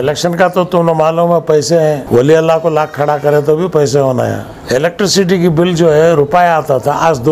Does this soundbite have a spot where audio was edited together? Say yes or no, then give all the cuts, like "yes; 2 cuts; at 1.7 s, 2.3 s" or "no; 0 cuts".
yes; 2 cuts; at 2.0 s, 4.5 s